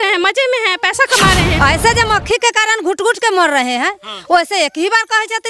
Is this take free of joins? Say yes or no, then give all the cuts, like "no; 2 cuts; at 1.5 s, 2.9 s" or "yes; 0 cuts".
no; 1 cut; at 1.6 s